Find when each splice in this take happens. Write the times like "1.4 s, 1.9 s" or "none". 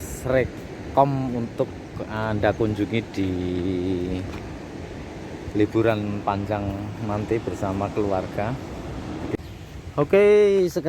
9.4 s